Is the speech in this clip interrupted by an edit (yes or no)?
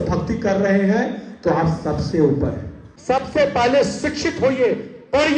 yes